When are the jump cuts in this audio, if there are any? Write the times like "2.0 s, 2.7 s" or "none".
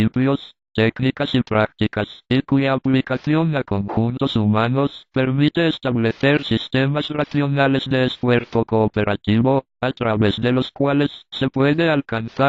none